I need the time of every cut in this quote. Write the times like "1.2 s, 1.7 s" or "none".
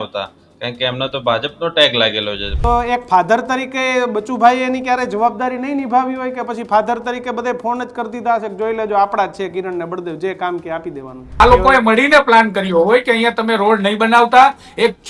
2.5 s, 11.3 s